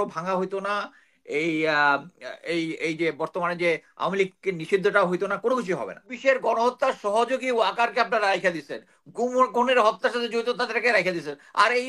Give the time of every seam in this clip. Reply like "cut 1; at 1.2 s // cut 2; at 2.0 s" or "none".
cut 1; at 6.1 s